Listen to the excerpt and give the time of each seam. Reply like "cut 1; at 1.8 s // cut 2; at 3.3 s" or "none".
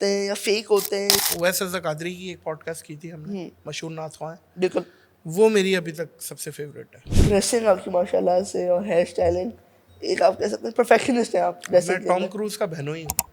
cut 1; at 1.1 s // cut 2; at 7.1 s